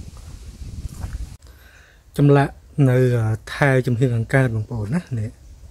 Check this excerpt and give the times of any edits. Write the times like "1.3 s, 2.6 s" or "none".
1.4 s